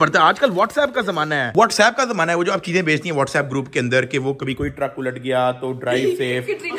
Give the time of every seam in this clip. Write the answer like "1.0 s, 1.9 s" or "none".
none